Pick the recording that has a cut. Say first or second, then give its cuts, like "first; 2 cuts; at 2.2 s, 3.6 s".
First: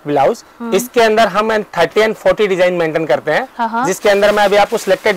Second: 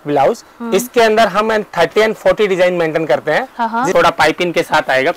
second; 1 cut; at 3.9 s